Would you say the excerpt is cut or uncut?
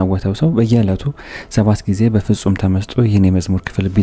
uncut